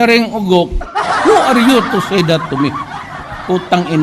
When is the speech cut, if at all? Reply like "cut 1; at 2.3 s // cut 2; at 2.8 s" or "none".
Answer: none